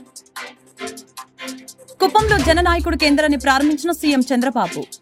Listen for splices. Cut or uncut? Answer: uncut